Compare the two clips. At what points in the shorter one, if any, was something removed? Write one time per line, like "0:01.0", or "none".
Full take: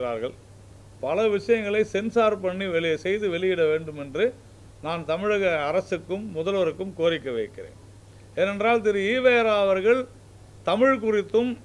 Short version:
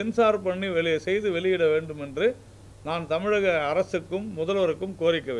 none